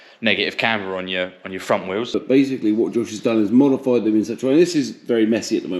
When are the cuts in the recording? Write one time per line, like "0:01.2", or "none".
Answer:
0:02.2

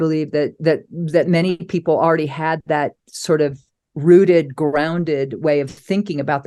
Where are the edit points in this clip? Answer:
none

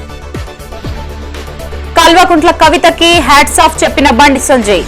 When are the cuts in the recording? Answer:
none

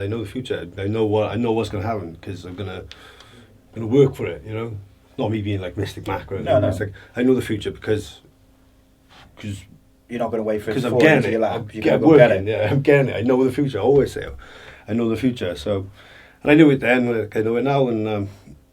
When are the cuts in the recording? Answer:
none

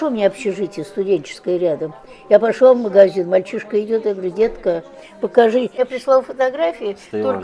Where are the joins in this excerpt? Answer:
0:05.7

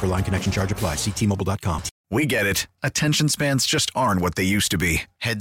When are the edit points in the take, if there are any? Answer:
0:01.9

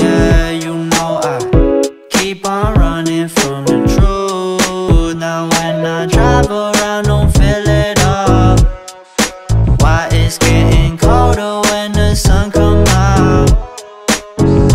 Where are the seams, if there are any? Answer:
0:04.9

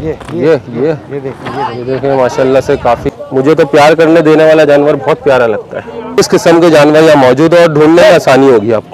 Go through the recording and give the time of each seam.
0:03.1
0:06.2

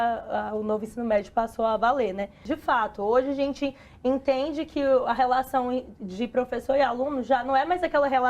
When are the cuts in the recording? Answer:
0:02.4

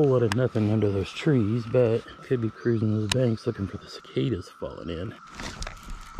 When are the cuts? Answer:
0:02.1
0:05.3

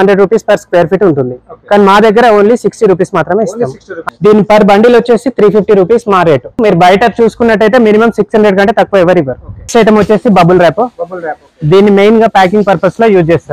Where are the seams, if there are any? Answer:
0:03.9
0:06.6
0:09.7

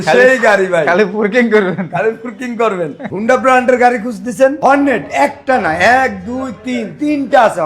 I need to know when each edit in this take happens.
0:03.0

